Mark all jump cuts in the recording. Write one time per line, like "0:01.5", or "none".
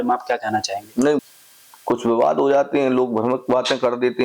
0:01.2